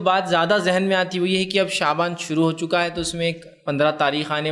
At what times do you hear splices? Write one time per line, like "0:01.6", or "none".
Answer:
0:01.0